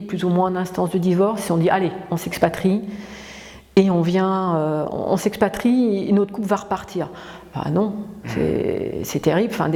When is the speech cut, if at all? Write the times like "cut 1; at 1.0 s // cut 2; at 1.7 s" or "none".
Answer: none